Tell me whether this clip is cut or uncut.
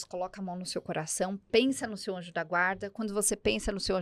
uncut